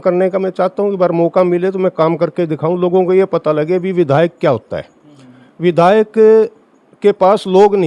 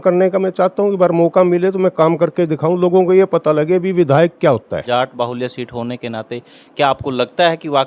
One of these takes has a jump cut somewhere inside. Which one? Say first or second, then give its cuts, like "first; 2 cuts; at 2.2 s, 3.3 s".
second; 1 cut; at 4.8 s